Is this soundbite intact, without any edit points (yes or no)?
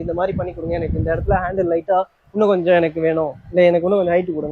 yes